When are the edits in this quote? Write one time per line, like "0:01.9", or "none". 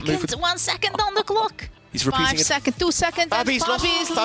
0:01.7